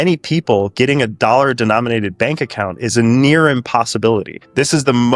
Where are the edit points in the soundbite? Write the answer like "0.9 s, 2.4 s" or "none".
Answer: none